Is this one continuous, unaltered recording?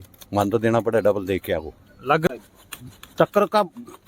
no; 1 cut; at 2.3 s

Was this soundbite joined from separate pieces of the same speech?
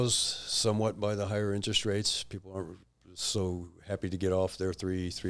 no; 0 cuts

